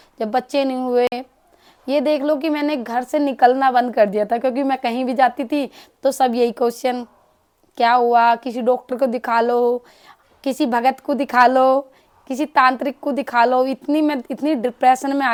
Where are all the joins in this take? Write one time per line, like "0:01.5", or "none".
none